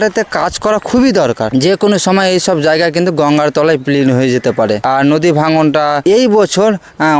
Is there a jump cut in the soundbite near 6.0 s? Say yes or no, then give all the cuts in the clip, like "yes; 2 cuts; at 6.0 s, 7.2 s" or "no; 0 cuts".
yes; 3 cuts; at 1.5 s, 4.8 s, 6.0 s